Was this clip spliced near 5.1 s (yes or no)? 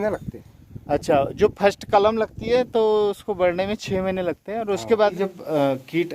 yes